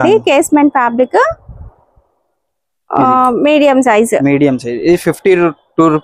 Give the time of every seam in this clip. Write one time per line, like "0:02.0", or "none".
none